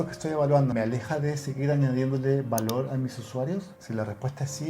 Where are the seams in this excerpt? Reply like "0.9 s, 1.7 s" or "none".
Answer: 0.7 s, 3.8 s